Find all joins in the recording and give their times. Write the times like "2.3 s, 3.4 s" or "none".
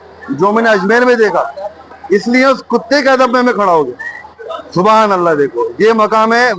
2.0 s